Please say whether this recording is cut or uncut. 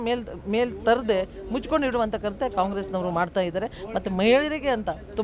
uncut